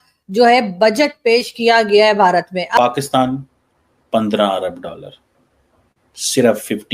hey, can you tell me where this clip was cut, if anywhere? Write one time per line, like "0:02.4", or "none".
0:02.8

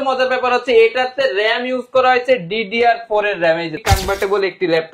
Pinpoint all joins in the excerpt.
0:03.8

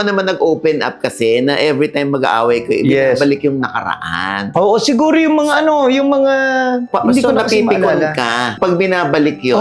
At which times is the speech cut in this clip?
none

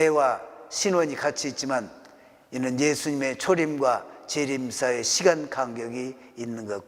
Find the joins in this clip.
none

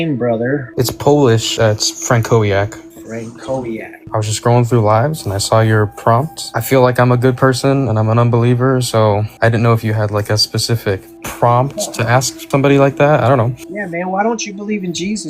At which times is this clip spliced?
0:04.0
0:06.5

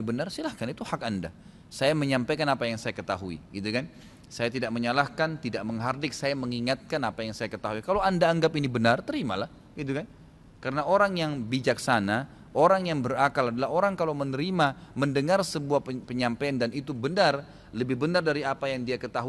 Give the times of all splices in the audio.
none

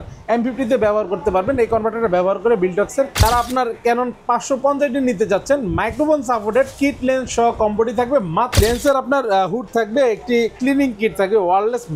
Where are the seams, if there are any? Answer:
0:03.2
0:08.6

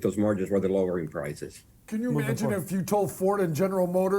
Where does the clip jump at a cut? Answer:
0:01.8

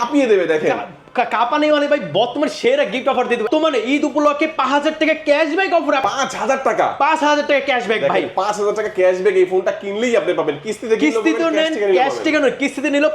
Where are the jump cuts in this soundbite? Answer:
0:03.5
0:06.0

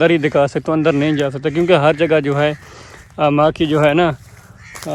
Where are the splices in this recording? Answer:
none

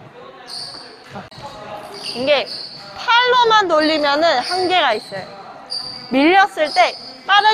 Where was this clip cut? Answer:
0:01.3

